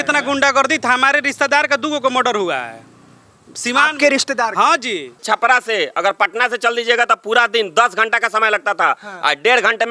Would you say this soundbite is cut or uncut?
cut